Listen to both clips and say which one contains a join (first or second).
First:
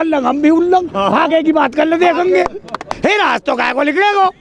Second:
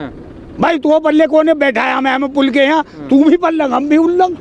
first